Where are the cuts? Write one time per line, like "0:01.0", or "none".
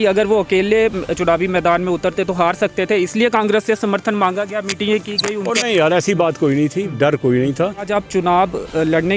0:07.9